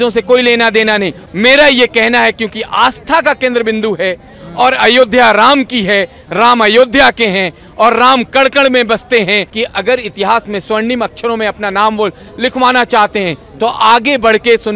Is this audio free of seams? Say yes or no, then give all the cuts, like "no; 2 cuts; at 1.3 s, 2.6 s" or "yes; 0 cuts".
no; 2 cuts; at 1.2 s, 9.5 s